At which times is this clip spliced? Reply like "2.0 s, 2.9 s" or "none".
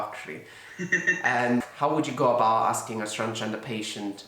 1.7 s